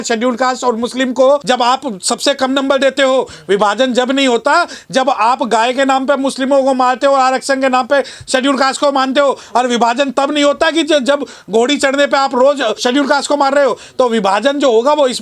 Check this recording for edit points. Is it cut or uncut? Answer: cut